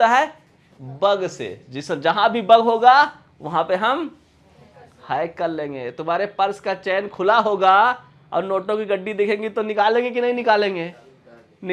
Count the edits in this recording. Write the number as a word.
zero